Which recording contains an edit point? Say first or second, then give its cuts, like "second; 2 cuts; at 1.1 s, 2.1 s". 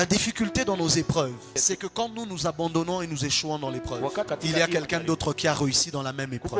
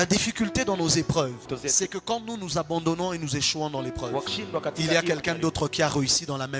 first; 2 cuts; at 1.5 s, 4.3 s